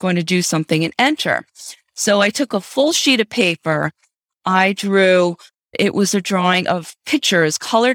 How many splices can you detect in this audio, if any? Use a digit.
1